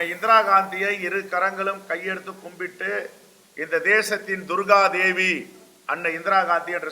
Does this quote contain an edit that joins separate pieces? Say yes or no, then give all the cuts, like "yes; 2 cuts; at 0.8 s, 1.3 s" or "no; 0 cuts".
no; 0 cuts